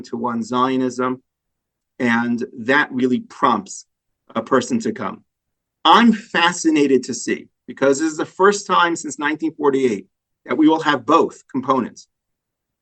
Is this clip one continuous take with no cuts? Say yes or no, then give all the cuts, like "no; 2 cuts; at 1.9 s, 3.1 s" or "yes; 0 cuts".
yes; 0 cuts